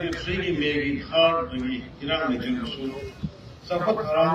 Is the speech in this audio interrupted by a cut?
no; 0 cuts

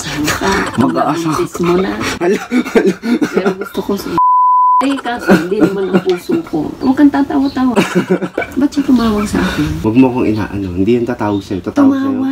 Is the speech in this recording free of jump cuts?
no; 3 cuts; at 4.8 s, 6.8 s, 9.8 s

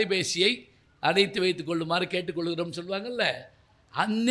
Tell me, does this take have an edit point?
no; 0 cuts

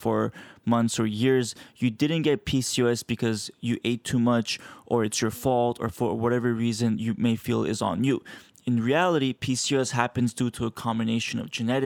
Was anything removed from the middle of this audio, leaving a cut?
no; 0 cuts

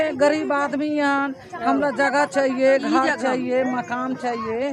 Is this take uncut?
yes; 0 cuts

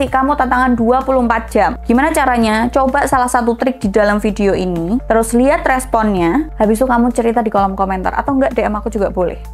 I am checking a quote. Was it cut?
no; 0 cuts

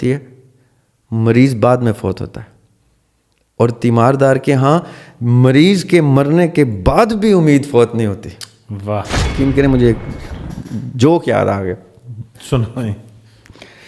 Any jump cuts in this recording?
yes; 1 cut; at 9.3 s

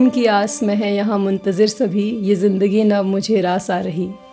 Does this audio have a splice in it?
no; 0 cuts

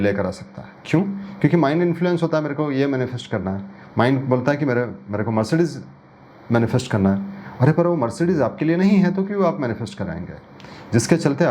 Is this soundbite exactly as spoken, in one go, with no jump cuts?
yes; 0 cuts

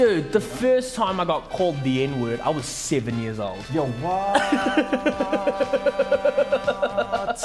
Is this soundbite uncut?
yes; 0 cuts

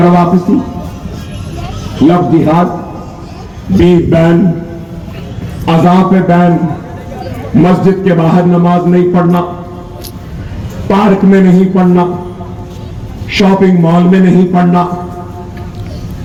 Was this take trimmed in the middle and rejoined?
no; 0 cuts

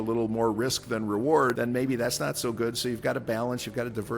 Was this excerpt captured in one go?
no; 1 cut; at 1.6 s

